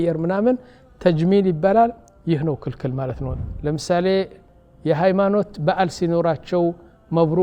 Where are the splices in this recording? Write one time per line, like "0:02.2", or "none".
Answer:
0:03.3